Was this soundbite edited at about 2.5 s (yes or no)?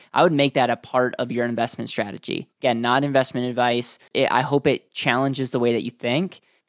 no